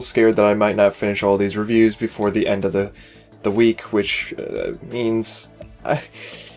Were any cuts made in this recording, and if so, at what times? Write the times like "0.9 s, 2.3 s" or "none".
2.3 s